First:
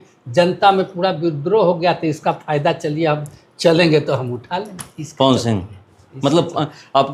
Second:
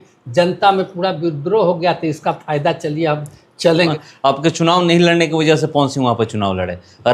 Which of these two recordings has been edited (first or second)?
second